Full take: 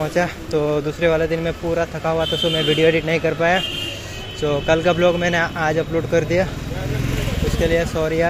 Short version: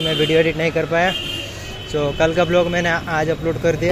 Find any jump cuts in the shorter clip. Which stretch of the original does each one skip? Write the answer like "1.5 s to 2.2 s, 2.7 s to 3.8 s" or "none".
none